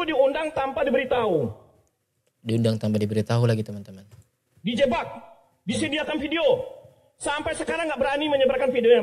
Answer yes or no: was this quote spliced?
no